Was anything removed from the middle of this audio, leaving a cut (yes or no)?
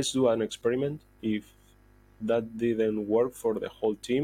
yes